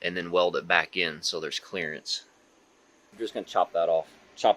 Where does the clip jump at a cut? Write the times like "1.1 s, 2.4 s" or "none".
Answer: 3.1 s